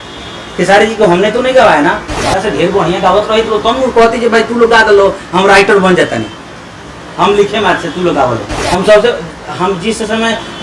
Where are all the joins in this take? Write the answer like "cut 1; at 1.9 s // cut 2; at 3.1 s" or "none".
cut 1; at 2.1 s // cut 2; at 8.5 s

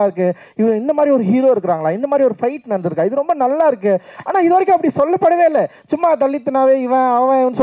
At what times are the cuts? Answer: none

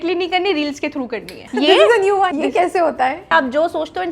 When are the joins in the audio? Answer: cut 1; at 1.4 s // cut 2; at 2.3 s // cut 3; at 3.3 s

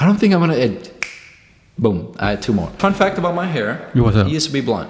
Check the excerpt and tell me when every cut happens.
cut 1; at 2.7 s

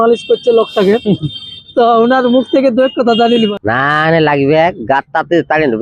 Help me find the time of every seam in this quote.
cut 1; at 3.5 s

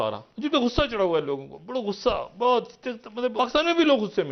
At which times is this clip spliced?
cut 1; at 3.3 s

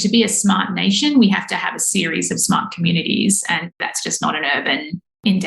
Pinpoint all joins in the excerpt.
cut 1; at 3.7 s

